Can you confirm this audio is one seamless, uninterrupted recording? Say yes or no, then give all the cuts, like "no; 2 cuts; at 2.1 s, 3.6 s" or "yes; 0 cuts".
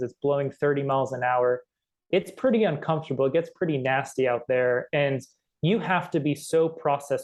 yes; 0 cuts